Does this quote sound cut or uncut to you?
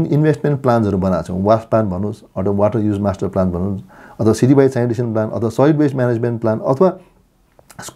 uncut